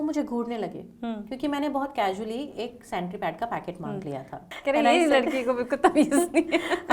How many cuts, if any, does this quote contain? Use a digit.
1